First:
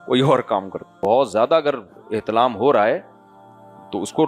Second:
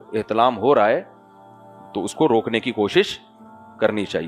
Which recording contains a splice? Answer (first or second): first